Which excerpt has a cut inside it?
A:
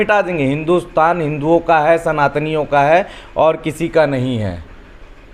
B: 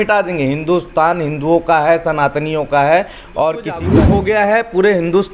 B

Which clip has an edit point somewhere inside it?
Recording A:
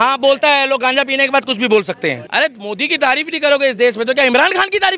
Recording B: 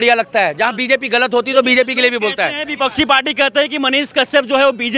A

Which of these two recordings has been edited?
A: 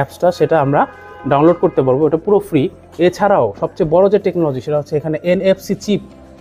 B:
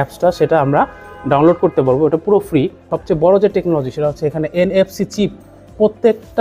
B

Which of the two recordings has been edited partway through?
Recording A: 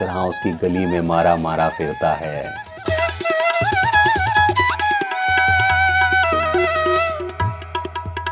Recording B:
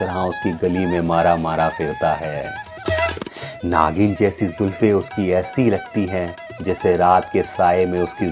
B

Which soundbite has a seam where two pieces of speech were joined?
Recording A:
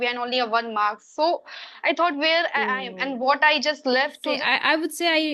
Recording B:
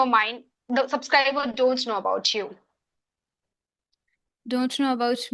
A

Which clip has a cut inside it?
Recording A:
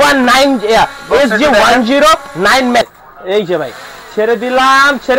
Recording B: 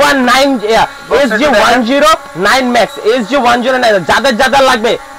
A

